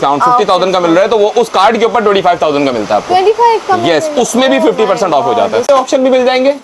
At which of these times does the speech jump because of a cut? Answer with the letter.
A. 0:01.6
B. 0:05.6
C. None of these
B